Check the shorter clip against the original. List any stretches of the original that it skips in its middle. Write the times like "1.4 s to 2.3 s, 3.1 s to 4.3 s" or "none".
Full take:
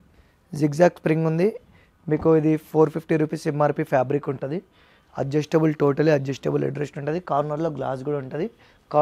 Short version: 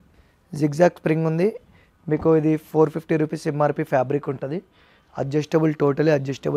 none